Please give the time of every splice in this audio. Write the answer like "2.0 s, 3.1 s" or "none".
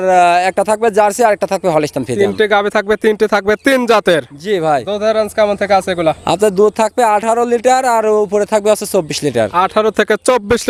none